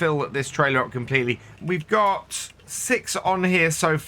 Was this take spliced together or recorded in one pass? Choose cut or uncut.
cut